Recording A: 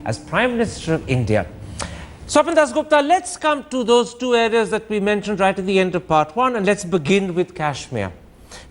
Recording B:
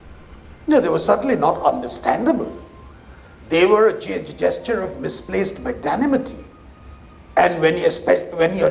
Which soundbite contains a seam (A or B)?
B